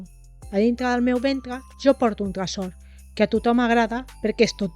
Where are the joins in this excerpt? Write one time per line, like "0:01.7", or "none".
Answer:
none